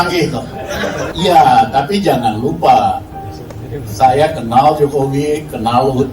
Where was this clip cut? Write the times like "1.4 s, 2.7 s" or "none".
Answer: 1.1 s